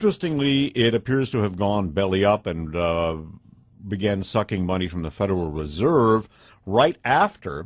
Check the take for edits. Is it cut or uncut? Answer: cut